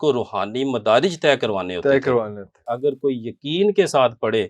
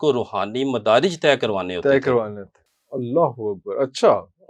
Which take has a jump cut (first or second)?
first